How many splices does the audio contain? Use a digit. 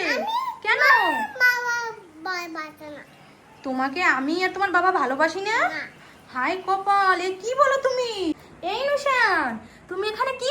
1